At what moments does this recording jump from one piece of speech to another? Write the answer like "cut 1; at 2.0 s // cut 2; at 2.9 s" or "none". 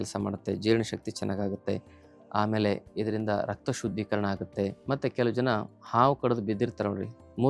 none